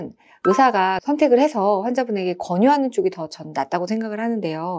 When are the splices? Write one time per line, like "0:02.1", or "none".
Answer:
none